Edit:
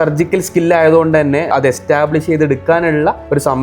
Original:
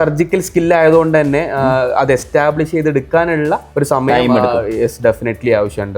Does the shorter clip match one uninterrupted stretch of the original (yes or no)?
no